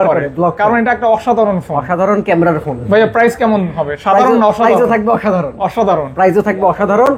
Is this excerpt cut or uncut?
uncut